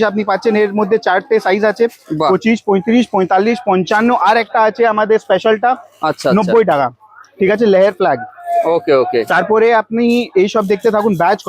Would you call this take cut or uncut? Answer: uncut